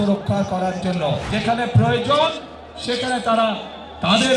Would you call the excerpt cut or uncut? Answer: cut